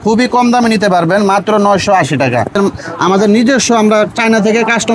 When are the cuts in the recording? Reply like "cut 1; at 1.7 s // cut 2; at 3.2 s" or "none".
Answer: cut 1; at 2.5 s